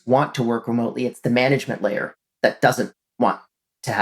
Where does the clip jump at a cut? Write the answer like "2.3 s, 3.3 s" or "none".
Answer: 3.0 s